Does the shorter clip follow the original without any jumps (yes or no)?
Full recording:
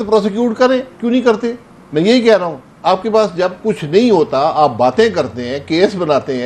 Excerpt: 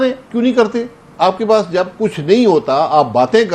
no